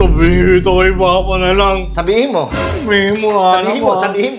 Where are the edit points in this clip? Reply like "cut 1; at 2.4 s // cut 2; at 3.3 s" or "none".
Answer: none